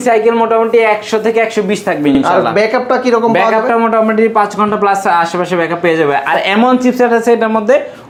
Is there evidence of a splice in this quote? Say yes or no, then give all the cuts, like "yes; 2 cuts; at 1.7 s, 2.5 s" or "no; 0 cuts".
no; 0 cuts